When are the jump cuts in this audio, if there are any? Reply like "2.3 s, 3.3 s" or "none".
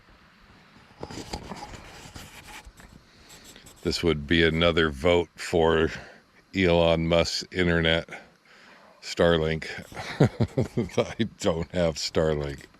11.3 s